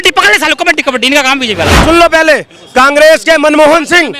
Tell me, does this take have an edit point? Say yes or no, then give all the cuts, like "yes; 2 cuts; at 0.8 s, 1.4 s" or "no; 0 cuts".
yes; 1 cut; at 1.8 s